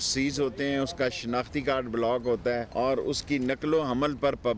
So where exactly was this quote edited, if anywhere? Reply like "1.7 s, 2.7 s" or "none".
2.7 s